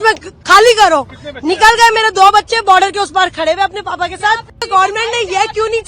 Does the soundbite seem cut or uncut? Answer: cut